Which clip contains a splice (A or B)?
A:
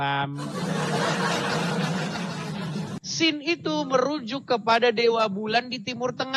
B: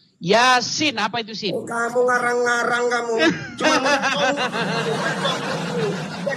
A